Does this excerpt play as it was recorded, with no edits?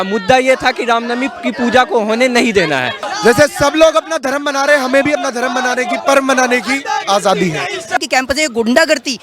no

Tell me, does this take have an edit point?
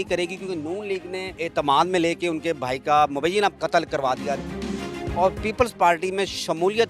yes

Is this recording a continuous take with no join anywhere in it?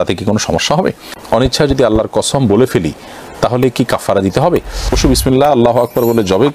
no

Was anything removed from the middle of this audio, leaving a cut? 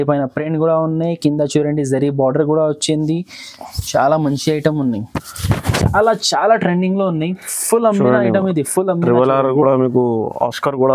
yes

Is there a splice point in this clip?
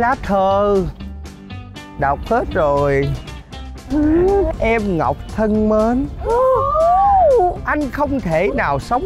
no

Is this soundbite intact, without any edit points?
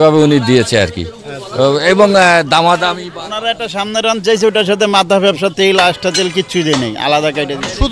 yes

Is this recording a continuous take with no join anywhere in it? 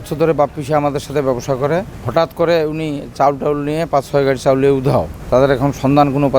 yes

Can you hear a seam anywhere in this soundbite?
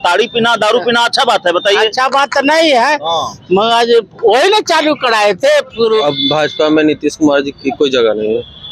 yes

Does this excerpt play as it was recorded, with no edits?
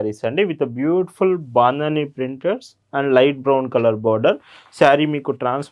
yes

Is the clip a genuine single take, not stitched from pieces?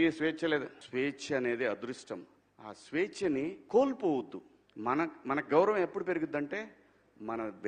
yes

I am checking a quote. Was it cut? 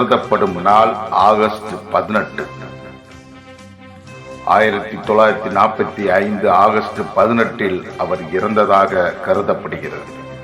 yes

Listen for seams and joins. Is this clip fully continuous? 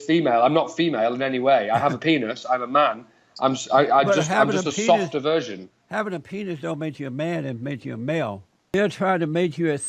no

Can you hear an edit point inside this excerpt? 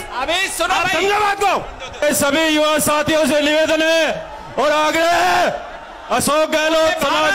yes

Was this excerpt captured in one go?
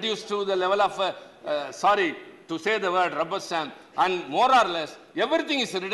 yes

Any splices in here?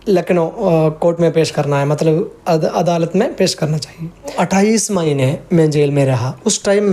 yes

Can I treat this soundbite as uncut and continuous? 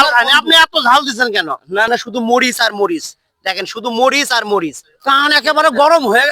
no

